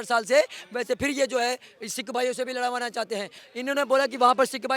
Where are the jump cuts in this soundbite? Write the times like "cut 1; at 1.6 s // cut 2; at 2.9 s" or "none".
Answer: cut 1; at 3.4 s